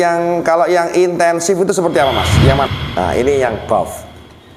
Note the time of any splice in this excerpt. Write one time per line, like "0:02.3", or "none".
0:02.7